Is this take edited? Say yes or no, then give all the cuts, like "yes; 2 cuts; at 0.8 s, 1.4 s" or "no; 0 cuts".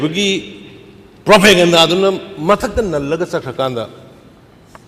no; 0 cuts